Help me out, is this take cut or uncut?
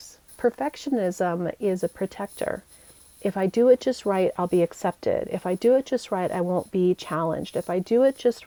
uncut